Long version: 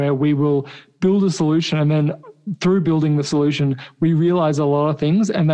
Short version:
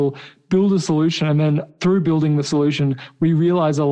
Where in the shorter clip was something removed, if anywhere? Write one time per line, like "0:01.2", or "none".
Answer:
0:01.7